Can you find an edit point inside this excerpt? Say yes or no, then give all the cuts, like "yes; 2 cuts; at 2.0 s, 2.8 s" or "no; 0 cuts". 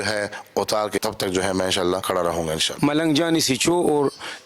yes; 2 cuts; at 1.0 s, 2.4 s